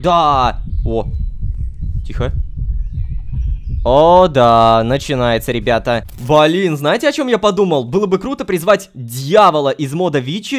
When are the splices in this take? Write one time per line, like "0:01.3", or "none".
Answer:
0:03.8
0:06.1